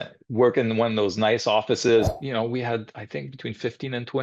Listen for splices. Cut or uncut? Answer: cut